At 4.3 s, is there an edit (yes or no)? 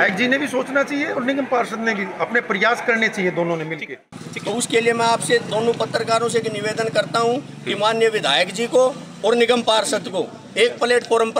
yes